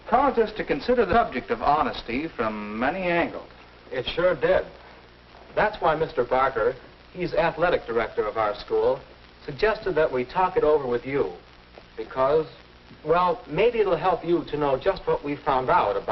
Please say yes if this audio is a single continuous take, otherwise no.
yes